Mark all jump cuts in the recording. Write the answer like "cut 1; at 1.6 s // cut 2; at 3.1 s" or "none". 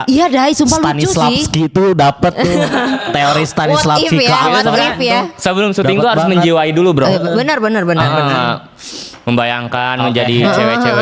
none